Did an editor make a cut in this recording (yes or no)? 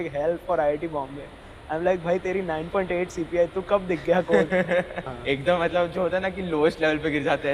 yes